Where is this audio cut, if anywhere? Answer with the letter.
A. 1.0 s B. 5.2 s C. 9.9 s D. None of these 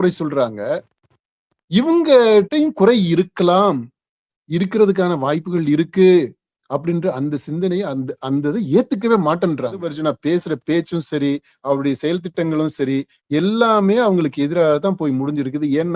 C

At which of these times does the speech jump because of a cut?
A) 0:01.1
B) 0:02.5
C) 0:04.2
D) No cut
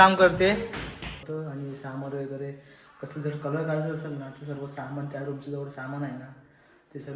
A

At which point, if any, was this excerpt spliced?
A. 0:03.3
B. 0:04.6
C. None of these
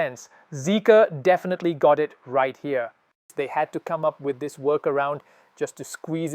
A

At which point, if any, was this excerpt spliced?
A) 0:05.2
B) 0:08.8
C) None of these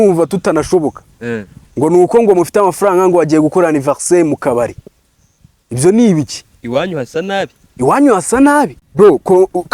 B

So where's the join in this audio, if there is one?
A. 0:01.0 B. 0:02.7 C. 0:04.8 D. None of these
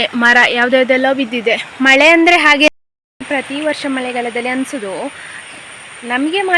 B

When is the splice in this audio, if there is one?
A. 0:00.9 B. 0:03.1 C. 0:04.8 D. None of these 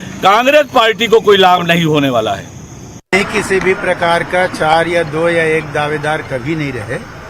B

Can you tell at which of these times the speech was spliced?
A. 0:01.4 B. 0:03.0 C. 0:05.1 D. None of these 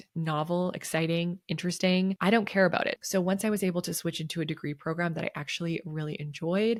D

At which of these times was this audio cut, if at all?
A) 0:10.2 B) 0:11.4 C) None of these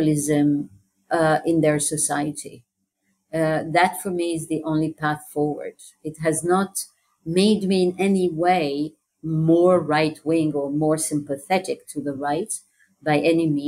C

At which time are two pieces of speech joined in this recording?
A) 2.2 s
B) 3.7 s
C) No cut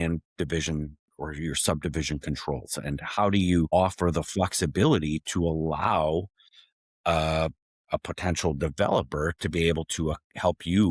B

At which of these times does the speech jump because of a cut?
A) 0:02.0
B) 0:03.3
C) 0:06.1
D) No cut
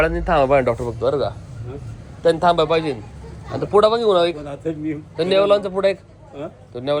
D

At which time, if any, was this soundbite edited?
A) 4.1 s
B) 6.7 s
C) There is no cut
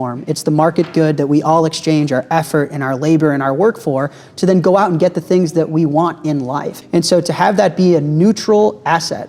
B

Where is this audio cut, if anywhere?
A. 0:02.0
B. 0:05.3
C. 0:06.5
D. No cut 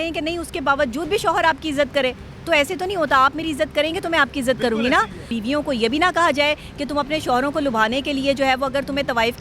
B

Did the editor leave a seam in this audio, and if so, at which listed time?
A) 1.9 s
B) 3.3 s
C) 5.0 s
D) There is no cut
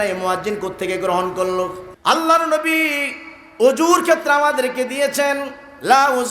A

